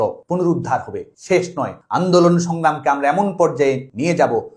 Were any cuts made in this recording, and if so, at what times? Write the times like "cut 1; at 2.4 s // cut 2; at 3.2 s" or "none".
cut 1; at 1.0 s